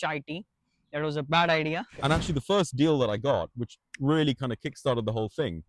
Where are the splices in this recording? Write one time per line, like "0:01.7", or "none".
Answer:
0:01.9